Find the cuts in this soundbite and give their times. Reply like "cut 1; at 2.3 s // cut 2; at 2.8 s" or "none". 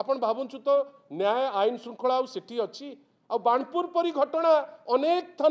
none